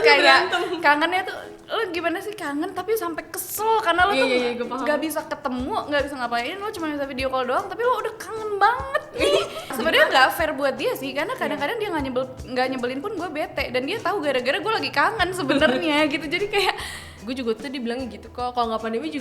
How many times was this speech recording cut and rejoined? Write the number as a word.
two